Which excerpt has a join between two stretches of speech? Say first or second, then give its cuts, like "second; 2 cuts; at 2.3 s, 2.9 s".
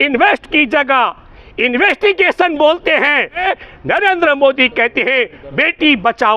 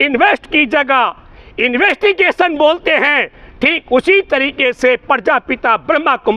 first; 1 cut; at 3.4 s